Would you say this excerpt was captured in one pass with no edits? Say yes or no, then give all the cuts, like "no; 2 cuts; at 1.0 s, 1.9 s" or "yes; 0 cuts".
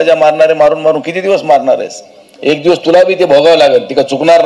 yes; 0 cuts